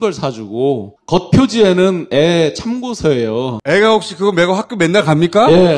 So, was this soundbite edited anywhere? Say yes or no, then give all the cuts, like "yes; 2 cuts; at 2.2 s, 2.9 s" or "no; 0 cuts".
no; 0 cuts